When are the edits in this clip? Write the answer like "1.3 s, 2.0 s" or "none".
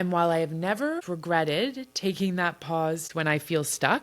1.0 s, 3.1 s